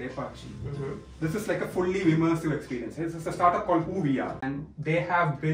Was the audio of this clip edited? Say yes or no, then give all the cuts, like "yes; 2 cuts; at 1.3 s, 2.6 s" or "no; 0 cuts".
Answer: yes; 1 cut; at 4.5 s